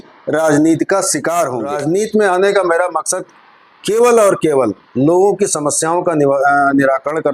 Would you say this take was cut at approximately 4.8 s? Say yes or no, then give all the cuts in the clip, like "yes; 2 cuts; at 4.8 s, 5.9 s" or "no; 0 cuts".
no; 1 cut; at 1.7 s